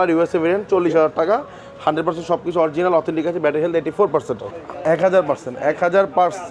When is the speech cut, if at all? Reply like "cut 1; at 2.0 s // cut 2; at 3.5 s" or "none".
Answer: cut 1; at 4.5 s